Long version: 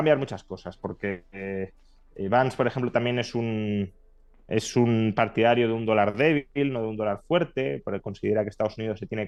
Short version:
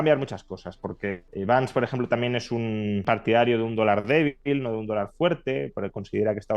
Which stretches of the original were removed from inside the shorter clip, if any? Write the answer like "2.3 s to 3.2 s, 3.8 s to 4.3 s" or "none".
1.2 s to 2.1 s, 3.9 s to 5.1 s